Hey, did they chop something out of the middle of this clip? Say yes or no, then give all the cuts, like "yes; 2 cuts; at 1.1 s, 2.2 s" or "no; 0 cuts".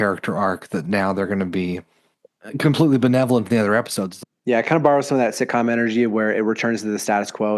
yes; 1 cut; at 4.0 s